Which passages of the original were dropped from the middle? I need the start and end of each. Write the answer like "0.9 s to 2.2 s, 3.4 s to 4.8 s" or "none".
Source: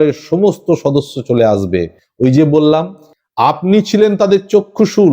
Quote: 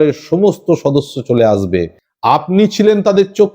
2.0 s to 3.1 s